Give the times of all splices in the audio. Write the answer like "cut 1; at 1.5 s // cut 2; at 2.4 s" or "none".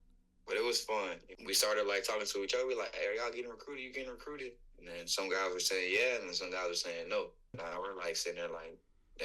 cut 1; at 1.3 s // cut 2; at 7.6 s

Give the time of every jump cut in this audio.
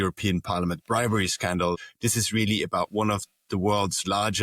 cut 1; at 1.8 s

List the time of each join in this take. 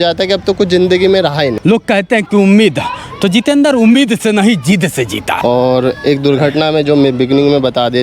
cut 1; at 1.5 s // cut 2; at 5.3 s

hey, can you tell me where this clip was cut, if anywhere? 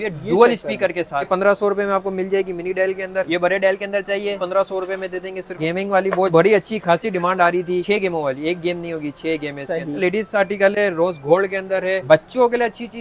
cut 1; at 1.3 s // cut 2; at 3.3 s // cut 3; at 5.6 s // cut 4; at 7.8 s // cut 5; at 10.0 s // cut 6; at 12.0 s

